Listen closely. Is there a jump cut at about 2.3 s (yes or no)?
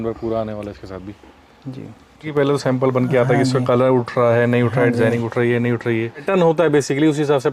yes